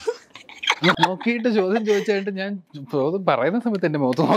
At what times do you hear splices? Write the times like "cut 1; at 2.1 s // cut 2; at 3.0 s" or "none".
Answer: cut 1; at 1.0 s

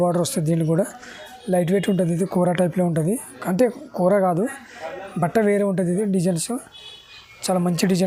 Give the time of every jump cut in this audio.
none

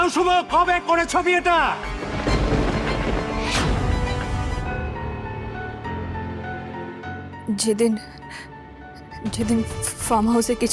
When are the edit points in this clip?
none

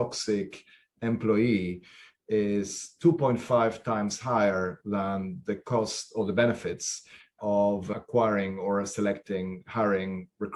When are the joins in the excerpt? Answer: none

